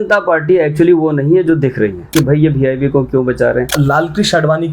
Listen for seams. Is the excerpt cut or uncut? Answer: cut